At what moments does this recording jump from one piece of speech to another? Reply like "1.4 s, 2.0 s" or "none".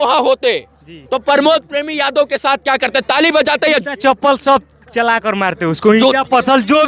none